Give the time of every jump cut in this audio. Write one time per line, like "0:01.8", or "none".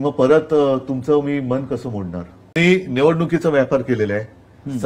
0:02.6